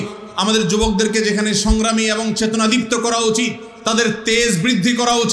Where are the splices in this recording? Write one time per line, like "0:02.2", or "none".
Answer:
none